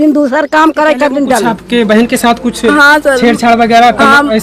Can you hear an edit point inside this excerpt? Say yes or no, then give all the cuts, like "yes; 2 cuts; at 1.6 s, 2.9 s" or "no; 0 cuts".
yes; 1 cut; at 1.5 s